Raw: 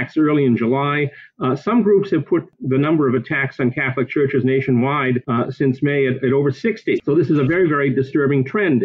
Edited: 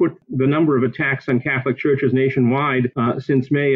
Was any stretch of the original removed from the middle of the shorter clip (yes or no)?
no